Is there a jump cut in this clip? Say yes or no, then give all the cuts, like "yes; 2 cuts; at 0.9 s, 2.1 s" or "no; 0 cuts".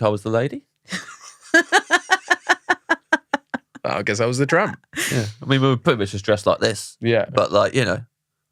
no; 0 cuts